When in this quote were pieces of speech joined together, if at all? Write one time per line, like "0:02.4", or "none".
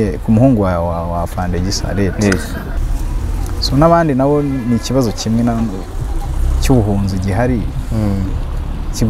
0:02.8